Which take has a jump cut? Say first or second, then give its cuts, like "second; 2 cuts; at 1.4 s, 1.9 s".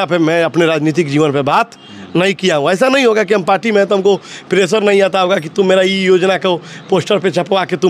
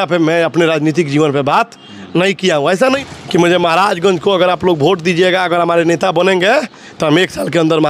second; 1 cut; at 3.0 s